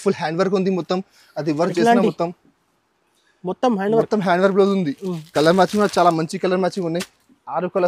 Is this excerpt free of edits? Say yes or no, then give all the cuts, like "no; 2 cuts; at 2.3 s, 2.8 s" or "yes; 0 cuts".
yes; 0 cuts